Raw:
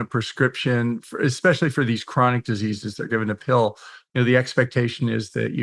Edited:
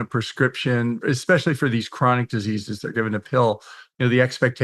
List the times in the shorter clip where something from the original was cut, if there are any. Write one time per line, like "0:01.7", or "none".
0:01.0

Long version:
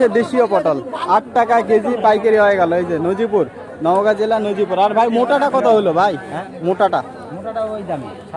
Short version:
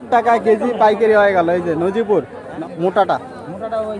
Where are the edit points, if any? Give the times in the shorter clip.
0:02.4

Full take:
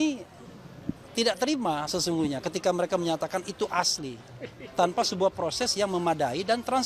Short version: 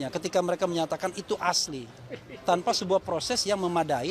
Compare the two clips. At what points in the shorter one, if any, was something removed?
none

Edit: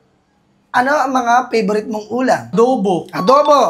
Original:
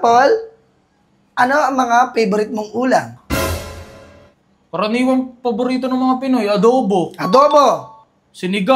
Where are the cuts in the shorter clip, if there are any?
0:02.5

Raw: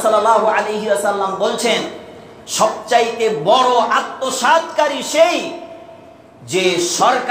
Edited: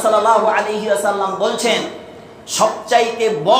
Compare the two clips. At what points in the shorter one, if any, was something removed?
none

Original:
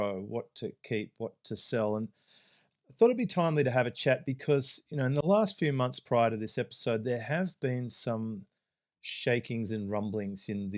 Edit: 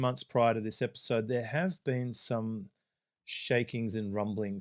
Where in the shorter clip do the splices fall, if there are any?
none

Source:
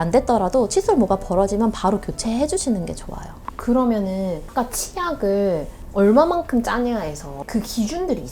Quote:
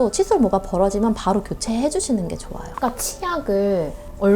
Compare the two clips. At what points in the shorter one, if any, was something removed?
0:02.7

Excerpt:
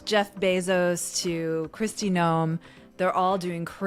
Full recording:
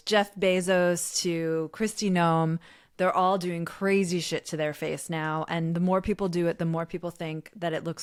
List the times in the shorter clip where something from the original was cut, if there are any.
none

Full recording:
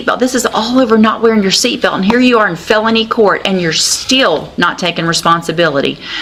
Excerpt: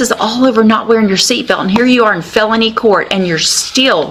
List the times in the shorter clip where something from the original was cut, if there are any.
none

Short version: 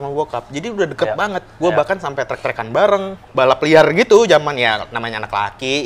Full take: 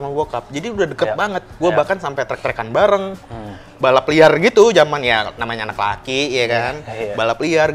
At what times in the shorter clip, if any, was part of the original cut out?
0:03.2

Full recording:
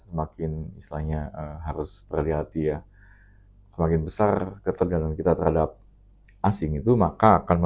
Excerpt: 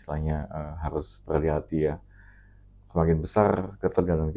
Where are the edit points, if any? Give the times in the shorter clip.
none

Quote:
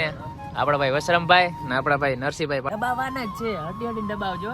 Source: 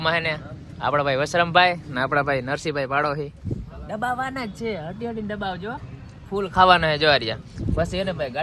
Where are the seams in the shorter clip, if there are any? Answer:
0:02.7

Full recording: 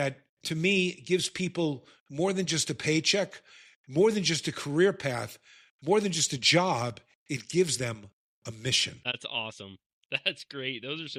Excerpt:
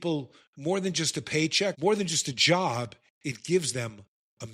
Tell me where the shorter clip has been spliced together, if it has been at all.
0:01.8

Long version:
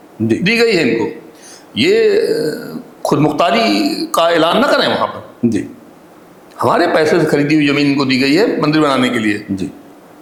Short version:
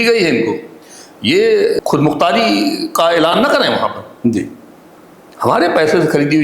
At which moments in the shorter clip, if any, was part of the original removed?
0:01.8

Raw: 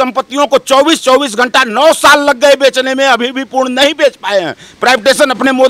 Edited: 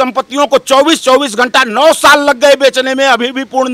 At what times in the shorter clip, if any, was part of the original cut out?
none

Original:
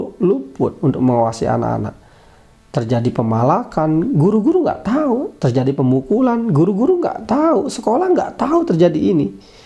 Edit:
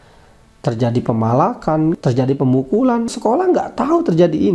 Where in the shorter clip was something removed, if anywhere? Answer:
0:02.0
0:03.1

